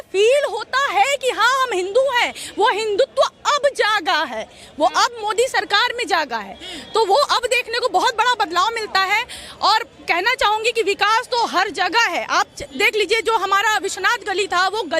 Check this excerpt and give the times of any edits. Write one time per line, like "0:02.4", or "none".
none